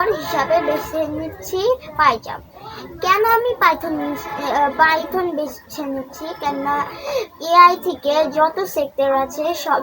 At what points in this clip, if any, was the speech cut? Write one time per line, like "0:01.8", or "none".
none